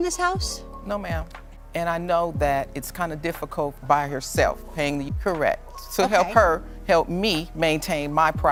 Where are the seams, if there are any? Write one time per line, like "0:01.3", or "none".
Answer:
none